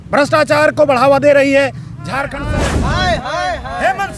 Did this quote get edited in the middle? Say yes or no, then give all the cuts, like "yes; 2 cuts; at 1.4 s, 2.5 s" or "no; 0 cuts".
yes; 1 cut; at 2.4 s